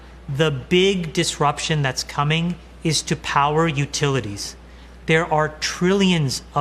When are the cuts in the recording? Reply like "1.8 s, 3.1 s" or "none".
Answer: none